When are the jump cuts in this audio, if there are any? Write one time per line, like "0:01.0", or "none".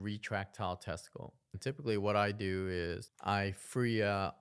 0:01.5
0:03.1